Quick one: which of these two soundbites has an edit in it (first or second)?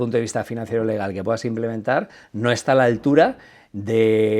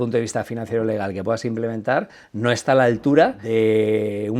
second